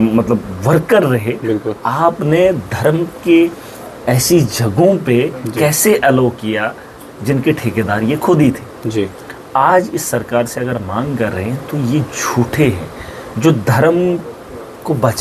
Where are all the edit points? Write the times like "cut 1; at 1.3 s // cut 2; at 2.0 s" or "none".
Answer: none